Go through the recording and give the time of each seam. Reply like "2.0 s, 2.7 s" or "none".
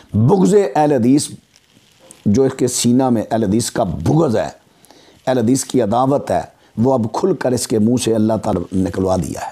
8.5 s